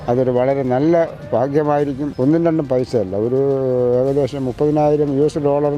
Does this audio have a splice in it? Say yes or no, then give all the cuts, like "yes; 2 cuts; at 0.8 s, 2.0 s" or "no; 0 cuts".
yes; 1 cut; at 2.1 s